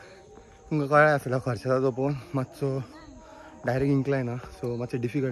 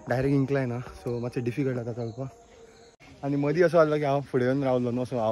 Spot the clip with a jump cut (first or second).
second